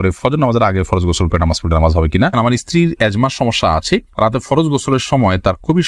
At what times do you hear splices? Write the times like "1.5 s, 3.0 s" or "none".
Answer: 2.3 s